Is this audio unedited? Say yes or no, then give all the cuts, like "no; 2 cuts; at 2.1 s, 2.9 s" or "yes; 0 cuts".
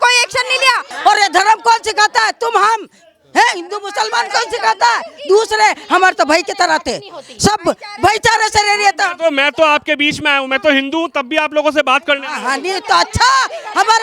no; 1 cut; at 0.9 s